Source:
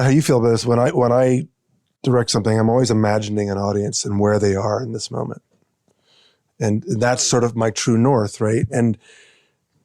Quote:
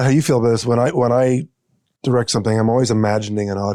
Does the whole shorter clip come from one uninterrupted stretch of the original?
yes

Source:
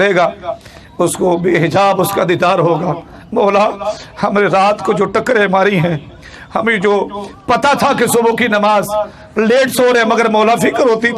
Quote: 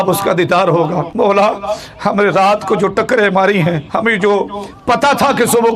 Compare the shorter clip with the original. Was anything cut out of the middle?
yes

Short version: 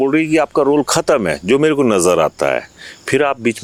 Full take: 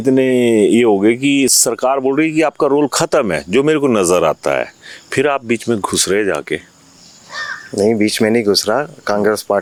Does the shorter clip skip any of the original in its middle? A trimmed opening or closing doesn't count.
no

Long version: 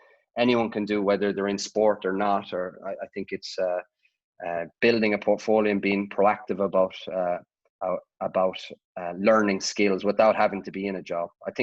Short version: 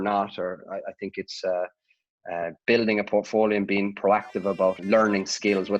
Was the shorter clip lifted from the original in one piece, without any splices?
no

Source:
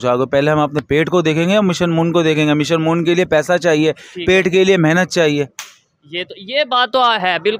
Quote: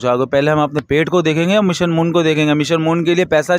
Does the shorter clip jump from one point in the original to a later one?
no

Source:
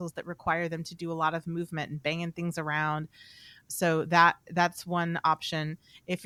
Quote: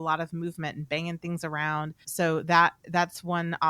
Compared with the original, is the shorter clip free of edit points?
no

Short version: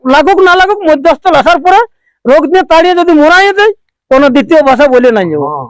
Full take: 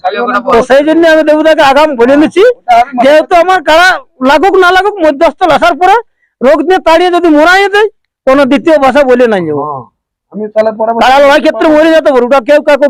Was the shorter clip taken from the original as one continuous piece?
yes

